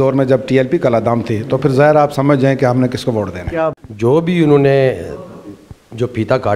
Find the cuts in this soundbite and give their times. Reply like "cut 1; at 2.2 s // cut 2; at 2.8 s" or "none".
cut 1; at 3.7 s